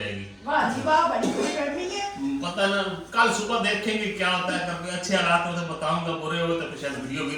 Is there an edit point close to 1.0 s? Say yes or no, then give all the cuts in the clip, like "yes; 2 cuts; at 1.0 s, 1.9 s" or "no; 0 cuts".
no; 0 cuts